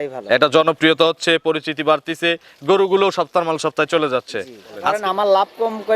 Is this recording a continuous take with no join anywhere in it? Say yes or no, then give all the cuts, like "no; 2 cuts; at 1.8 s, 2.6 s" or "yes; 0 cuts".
no; 1 cut; at 4.9 s